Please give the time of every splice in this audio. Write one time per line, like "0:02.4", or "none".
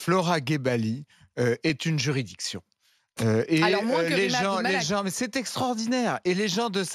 none